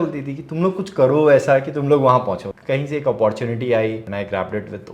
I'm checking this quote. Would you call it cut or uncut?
cut